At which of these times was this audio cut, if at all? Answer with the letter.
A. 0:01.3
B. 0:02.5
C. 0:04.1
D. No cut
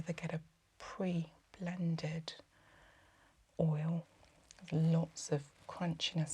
C